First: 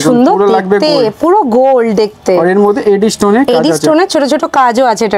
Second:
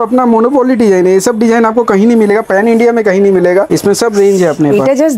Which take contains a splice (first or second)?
second